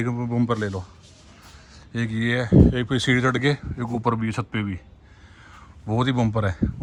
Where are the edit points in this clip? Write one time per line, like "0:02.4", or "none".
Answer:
none

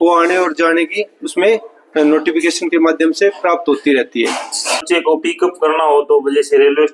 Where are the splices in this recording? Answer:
0:04.8

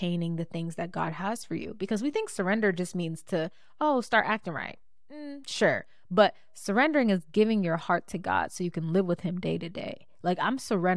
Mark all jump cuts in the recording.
none

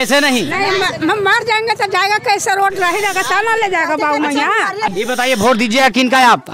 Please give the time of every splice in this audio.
0:04.9

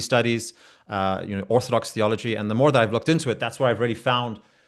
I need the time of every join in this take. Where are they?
none

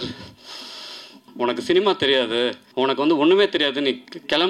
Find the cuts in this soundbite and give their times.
0:01.2
0:02.6

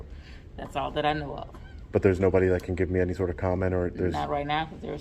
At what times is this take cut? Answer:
none

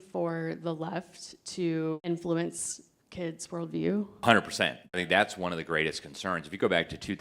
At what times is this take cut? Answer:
0:02.0
0:04.2
0:05.0

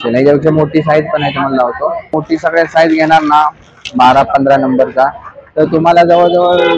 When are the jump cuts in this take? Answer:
0:02.2

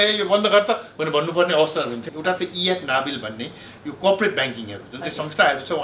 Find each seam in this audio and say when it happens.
0:02.1

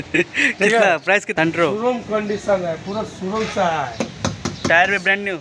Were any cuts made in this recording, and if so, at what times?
0:01.3

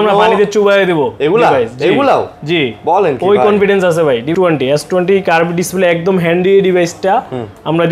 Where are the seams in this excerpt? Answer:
0:04.3

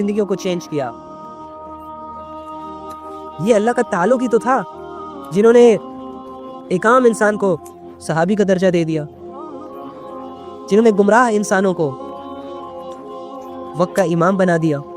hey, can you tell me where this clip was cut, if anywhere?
0:00.9
0:03.4

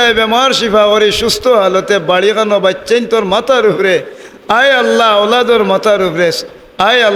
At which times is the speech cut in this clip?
none

